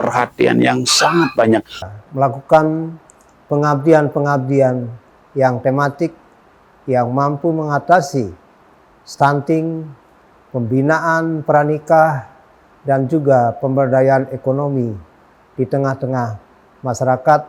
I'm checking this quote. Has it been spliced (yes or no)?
yes